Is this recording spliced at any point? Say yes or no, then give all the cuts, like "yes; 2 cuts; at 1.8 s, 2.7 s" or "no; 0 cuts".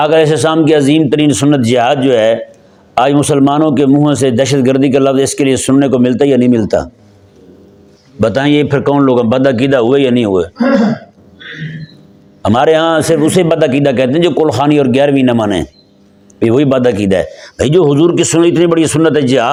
no; 0 cuts